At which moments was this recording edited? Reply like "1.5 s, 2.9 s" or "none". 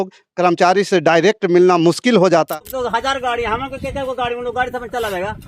2.5 s

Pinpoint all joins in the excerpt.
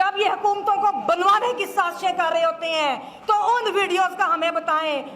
none

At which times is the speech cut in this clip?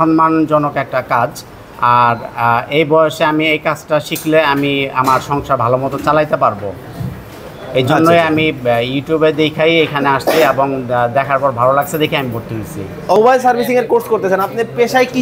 13.2 s

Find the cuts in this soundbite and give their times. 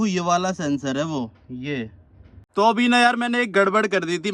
2.4 s

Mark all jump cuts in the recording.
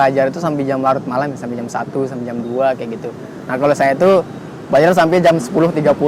none

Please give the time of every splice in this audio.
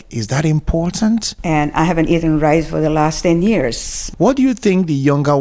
1.3 s, 4.0 s

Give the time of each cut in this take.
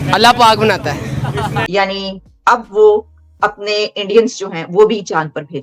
1.7 s

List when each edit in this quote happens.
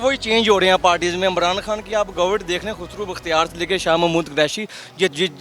none

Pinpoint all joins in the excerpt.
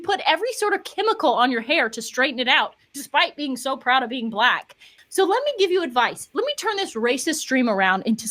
5.0 s

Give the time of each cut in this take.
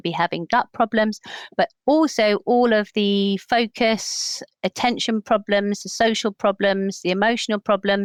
none

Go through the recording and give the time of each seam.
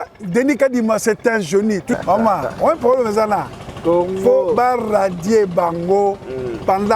2.0 s

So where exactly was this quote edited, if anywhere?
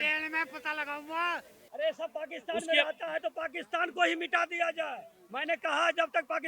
1.6 s

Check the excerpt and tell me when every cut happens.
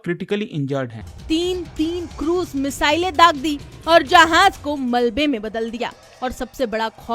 1.0 s

